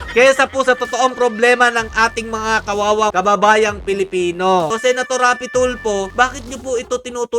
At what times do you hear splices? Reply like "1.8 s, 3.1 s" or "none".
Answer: 3.1 s, 4.7 s

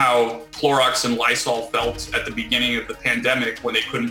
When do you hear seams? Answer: none

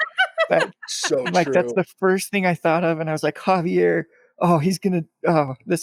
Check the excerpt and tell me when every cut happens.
none

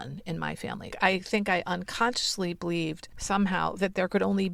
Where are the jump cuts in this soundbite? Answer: 0.9 s, 3.1 s

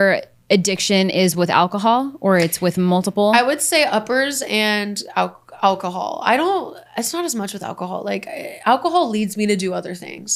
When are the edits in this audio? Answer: none

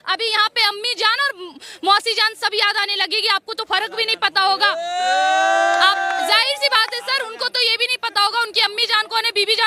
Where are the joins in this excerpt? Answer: none

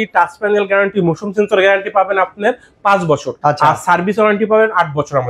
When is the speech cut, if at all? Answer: 3.3 s

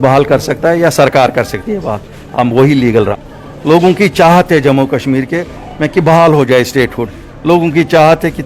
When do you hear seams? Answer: 3.3 s

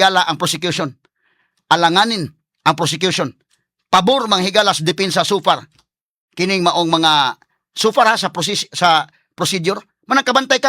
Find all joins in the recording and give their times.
none

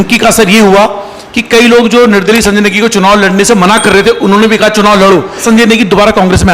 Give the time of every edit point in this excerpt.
5.4 s

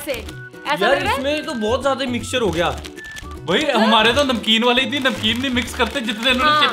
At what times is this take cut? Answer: none

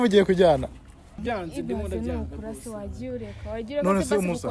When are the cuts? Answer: 1.2 s

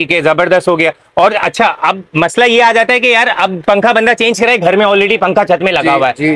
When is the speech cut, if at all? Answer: none

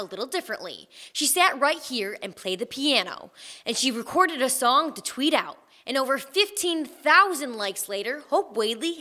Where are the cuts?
none

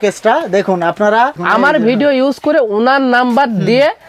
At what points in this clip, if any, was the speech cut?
1.4 s

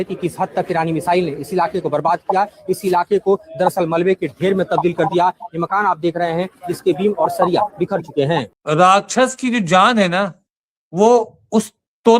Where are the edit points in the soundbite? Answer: 8.5 s

